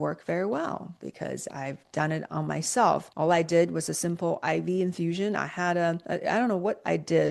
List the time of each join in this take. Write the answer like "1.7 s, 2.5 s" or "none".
3.1 s, 6.0 s